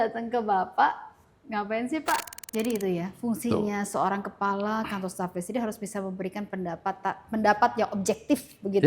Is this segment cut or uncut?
cut